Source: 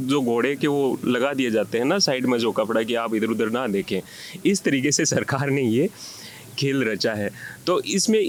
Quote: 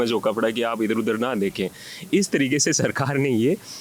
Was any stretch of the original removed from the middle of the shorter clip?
no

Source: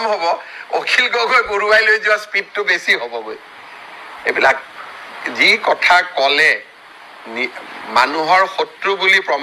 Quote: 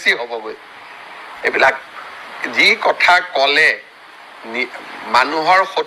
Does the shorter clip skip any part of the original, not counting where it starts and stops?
no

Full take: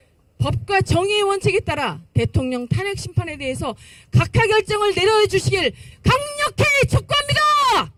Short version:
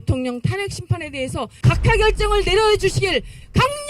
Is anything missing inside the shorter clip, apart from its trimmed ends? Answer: yes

